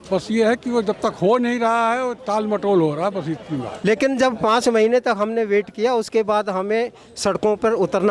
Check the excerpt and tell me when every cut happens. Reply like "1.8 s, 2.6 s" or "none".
3.6 s